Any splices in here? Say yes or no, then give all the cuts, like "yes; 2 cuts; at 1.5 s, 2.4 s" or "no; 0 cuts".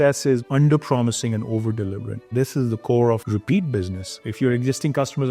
yes; 1 cut; at 2.1 s